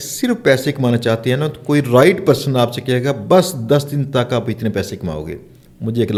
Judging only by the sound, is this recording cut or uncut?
uncut